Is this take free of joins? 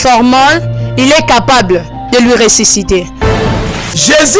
no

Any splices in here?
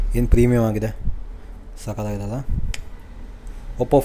no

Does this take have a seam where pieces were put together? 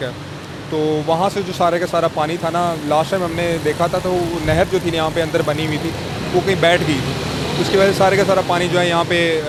no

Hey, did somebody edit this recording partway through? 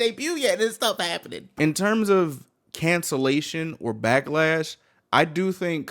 yes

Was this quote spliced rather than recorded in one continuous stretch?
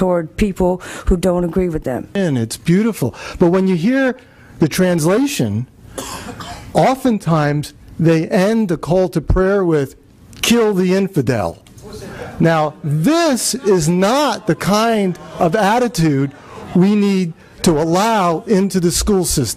no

